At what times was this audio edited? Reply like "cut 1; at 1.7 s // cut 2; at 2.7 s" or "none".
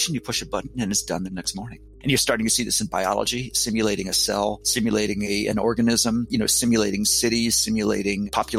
cut 1; at 1.9 s

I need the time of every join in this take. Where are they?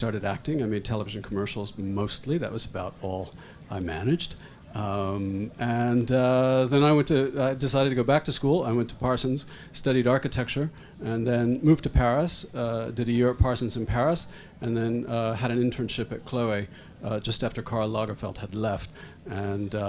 cut 1; at 10.2 s

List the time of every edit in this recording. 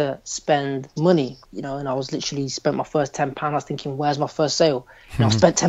cut 1; at 0.9 s // cut 2; at 1.5 s

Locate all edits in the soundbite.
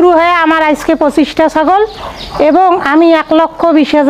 none

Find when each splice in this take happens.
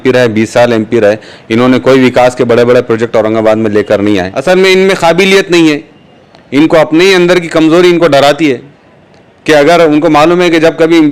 cut 1; at 4.3 s

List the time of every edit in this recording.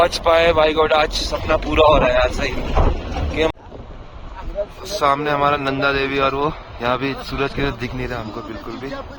cut 1; at 3.5 s

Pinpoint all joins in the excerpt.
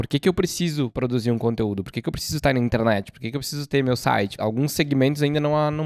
cut 1; at 0.9 s // cut 2; at 4.3 s

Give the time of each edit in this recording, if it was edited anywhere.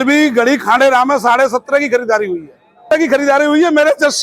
cut 1; at 2.8 s

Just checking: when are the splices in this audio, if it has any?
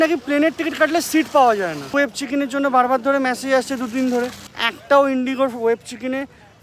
none

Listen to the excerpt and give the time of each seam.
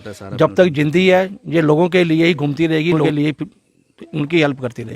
cut 1; at 3.0 s

